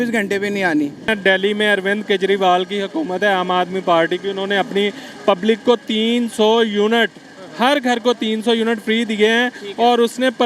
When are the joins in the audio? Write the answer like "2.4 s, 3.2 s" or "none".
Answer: 1.1 s